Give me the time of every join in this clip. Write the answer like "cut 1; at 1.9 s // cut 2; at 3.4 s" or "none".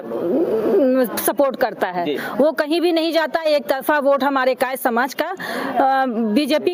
none